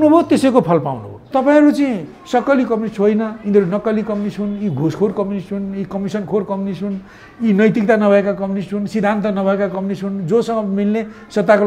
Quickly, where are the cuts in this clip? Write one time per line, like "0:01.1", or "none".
0:01.3